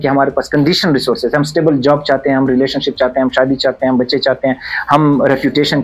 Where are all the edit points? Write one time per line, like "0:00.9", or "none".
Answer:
none